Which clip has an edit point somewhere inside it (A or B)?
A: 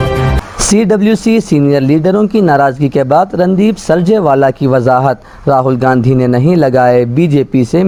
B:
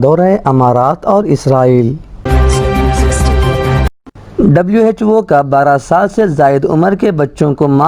B